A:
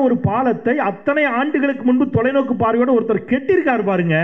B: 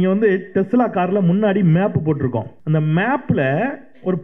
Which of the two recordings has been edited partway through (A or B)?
B